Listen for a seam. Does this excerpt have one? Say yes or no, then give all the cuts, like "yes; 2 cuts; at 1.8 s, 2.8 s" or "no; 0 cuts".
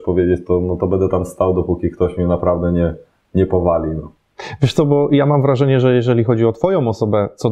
no; 0 cuts